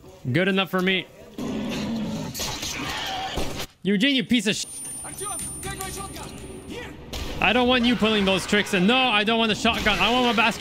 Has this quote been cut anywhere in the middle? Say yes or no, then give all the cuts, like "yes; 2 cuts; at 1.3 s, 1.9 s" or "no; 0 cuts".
yes; 1 cut; at 1.4 s